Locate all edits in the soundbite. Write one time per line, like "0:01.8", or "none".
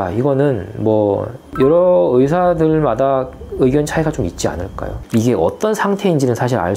0:05.0